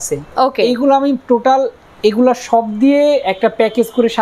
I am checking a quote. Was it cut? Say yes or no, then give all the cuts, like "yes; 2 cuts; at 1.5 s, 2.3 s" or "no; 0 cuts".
no; 0 cuts